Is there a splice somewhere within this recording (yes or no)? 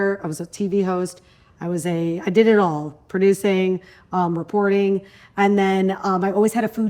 no